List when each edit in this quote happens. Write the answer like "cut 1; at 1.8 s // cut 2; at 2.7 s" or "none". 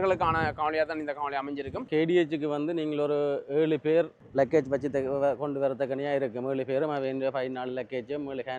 cut 1; at 1.9 s // cut 2; at 4.2 s